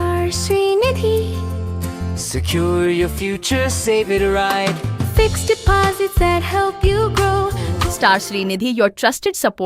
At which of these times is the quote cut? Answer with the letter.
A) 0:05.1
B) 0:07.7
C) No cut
B